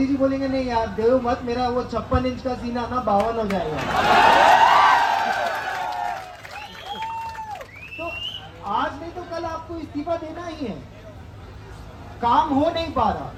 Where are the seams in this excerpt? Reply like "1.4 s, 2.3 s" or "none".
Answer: none